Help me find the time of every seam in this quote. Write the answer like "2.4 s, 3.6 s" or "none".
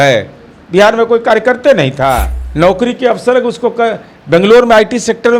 2.4 s